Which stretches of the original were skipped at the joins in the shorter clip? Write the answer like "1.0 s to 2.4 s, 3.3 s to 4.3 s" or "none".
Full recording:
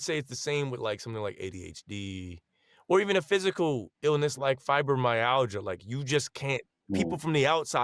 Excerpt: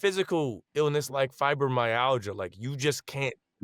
none